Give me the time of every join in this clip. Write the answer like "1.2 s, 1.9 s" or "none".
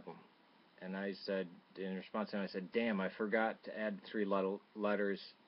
2.8 s